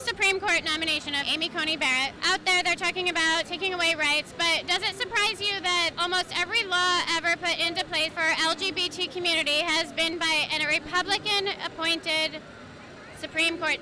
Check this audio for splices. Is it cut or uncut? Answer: cut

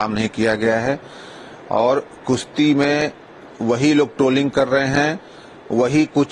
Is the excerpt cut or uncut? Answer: uncut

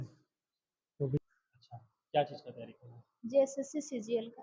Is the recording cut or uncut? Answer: cut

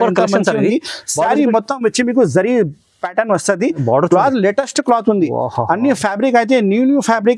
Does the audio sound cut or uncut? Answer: uncut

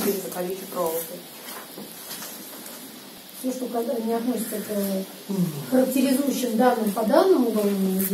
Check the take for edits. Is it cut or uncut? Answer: cut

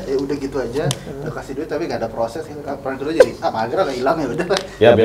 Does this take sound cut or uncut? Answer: uncut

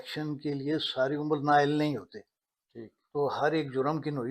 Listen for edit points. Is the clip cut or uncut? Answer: uncut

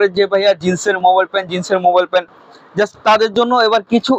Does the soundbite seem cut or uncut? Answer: uncut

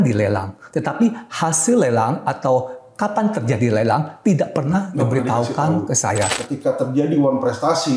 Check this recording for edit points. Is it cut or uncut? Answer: cut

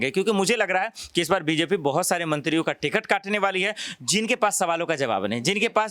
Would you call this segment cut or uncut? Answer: uncut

